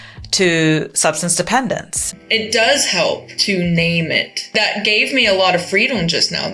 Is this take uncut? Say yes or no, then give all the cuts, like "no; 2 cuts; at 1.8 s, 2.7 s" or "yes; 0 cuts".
no; 3 cuts; at 2.1 s, 3.4 s, 4.5 s